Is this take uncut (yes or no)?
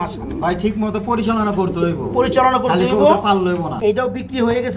no